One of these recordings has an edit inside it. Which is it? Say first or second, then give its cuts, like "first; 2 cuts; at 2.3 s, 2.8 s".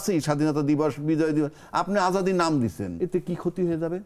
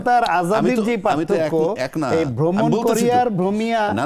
first; 1 cut; at 2.9 s